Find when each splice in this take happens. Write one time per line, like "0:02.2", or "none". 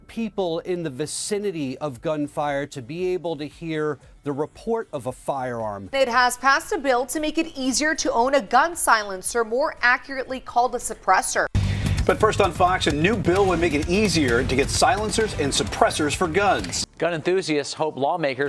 0:05.8
0:11.5
0:16.8